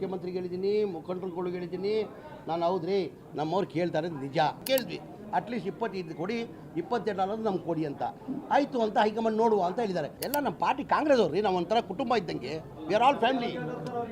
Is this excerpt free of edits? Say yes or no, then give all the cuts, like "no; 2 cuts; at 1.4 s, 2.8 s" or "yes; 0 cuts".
no; 2 cuts; at 4.6 s, 10.2 s